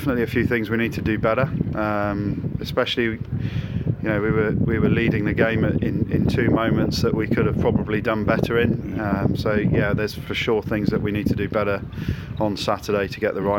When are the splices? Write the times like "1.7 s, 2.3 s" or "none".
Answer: none

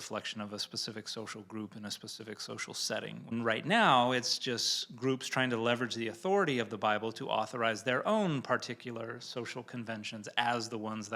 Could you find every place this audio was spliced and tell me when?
3.3 s

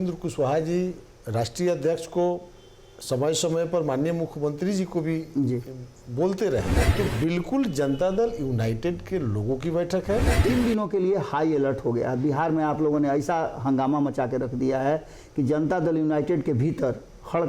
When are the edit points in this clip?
6.8 s, 10.3 s

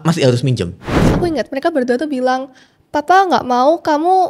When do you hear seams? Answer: 1.0 s

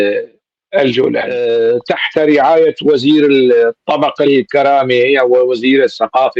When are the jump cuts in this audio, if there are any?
1.3 s

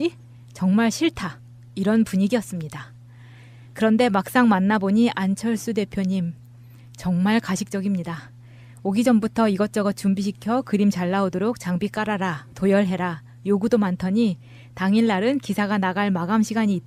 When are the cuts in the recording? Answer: none

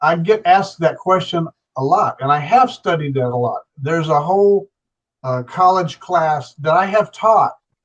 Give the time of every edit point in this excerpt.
none

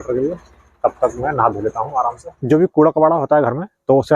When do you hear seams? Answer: 2.3 s

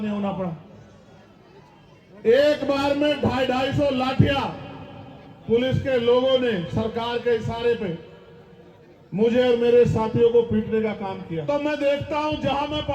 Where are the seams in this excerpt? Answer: 11.4 s

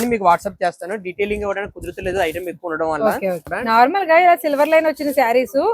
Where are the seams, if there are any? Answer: 3.5 s

